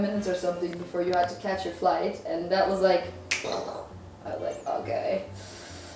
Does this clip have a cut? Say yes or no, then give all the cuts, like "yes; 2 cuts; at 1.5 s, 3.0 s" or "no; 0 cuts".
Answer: no; 0 cuts